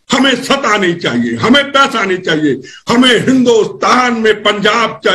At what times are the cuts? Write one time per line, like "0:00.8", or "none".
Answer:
none